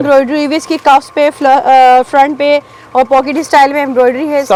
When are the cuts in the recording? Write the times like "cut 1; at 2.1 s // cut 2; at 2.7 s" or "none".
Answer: none